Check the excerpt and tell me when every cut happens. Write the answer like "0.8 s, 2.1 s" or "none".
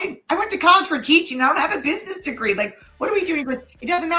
none